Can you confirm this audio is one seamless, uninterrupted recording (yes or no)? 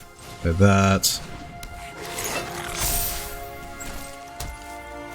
yes